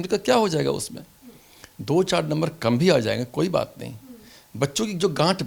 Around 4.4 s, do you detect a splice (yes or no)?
no